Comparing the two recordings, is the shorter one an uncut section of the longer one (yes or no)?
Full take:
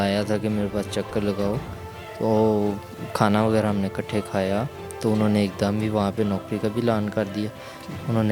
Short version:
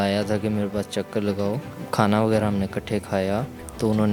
no